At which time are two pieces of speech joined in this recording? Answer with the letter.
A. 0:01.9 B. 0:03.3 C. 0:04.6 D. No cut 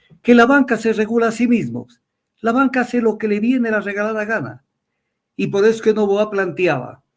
D